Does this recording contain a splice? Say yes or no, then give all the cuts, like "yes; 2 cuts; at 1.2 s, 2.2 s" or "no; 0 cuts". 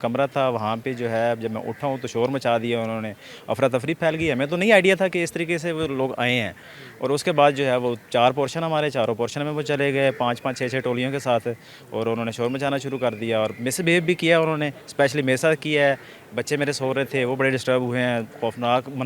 no; 0 cuts